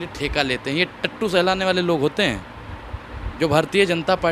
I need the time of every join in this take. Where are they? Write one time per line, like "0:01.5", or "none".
none

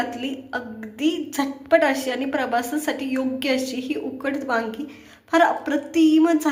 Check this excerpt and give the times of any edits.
none

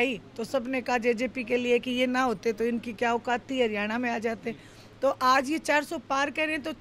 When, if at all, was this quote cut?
none

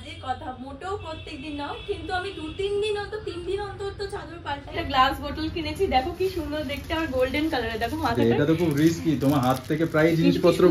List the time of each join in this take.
0:04.8

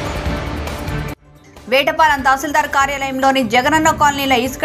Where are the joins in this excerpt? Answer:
none

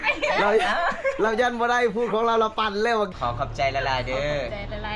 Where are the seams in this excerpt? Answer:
0:03.1

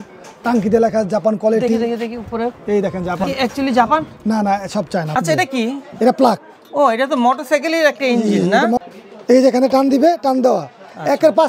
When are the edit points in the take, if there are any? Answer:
0:03.2
0:05.1
0:08.8

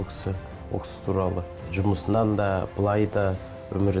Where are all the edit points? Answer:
0:01.6

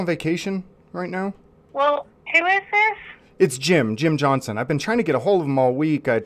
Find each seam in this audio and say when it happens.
none

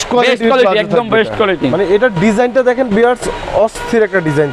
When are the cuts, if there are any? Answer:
none

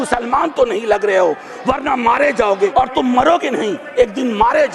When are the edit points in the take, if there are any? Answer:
0:02.7

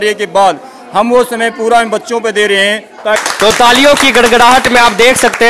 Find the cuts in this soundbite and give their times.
0:03.2

